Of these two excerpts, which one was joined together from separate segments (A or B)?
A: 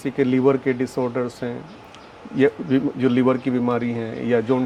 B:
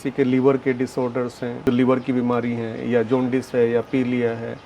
B